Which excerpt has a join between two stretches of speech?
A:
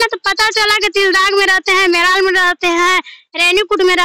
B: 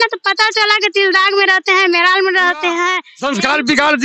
B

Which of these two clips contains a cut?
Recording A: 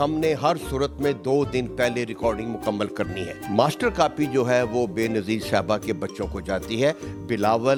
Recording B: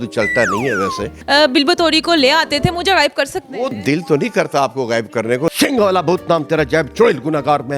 B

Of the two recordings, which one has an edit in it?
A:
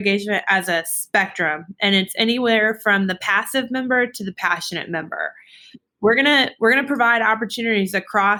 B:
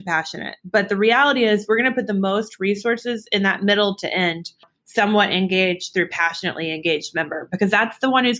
B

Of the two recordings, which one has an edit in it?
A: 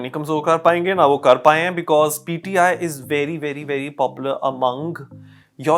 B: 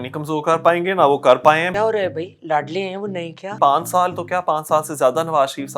B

